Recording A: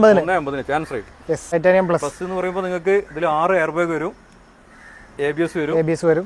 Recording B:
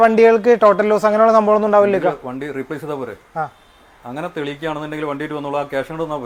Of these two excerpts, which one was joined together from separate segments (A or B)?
A